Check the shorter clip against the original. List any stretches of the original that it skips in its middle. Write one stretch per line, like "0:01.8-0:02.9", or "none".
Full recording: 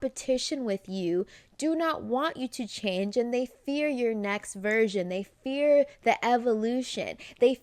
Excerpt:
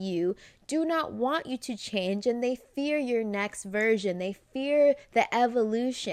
none